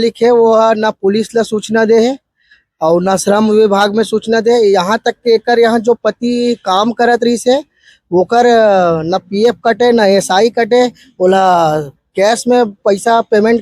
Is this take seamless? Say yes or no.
yes